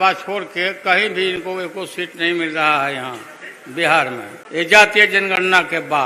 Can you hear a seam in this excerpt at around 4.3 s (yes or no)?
yes